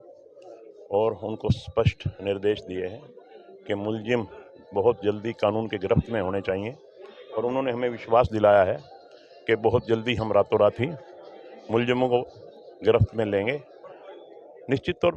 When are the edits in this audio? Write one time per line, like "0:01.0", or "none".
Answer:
none